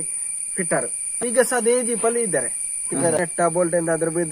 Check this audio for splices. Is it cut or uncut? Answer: cut